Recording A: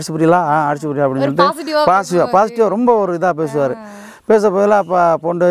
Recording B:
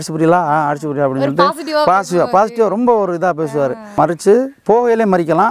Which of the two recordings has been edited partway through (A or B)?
B